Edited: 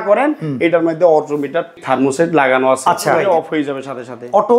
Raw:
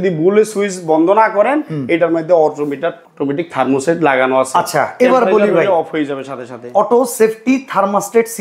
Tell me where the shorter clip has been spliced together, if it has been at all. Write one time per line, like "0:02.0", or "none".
0:01.8
0:03.2